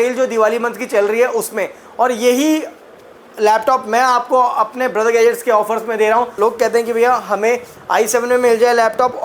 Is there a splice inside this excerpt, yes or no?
yes